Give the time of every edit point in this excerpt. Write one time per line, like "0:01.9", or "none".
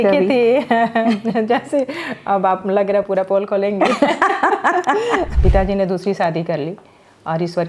0:05.3